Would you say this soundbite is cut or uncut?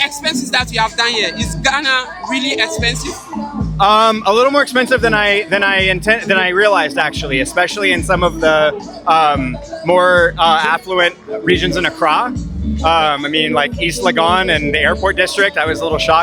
uncut